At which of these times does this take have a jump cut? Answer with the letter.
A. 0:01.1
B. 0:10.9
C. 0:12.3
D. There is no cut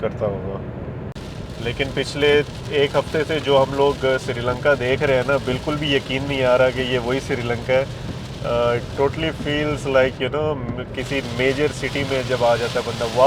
A